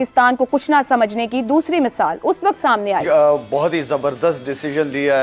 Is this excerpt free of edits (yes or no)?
no